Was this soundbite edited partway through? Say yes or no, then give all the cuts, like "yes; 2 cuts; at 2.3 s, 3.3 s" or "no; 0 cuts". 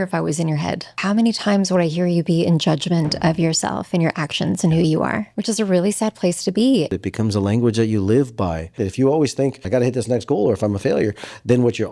yes; 5 cuts; at 0.9 s, 5.3 s, 6.9 s, 8.8 s, 9.6 s